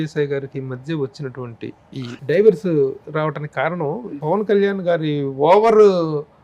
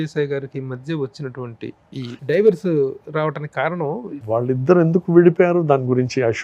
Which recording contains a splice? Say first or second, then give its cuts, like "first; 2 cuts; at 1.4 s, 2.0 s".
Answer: second; 1 cut; at 4.2 s